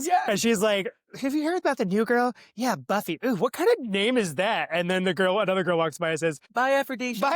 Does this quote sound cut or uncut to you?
cut